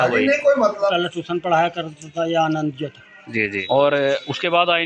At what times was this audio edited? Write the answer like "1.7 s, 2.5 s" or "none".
0.9 s, 3.6 s